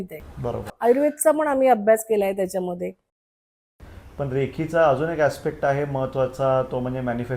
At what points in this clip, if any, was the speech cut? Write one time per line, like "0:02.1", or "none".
0:03.6